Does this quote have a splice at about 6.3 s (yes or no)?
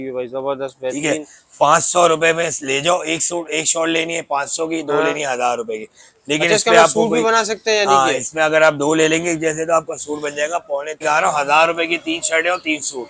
no